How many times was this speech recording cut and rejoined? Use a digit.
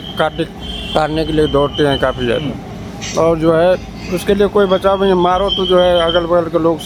0